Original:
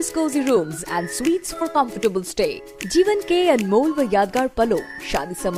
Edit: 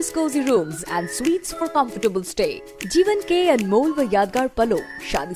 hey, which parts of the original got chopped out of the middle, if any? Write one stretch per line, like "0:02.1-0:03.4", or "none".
none